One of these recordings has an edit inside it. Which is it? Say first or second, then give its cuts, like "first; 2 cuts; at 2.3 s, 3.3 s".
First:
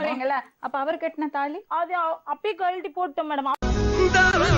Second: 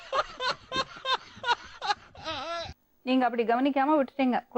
second; 1 cut; at 2.8 s